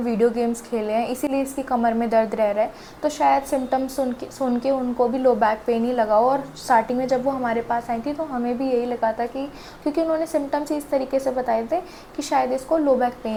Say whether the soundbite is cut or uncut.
uncut